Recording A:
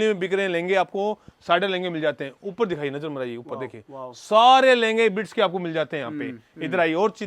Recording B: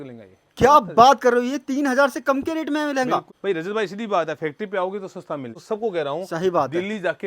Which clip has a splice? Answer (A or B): B